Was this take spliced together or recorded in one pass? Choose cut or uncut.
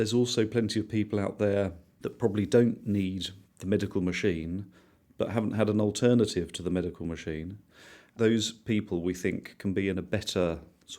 cut